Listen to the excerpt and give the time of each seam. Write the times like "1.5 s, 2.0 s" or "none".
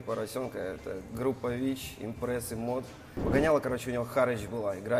3.0 s